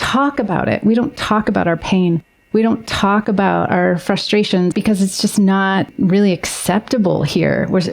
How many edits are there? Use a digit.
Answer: 2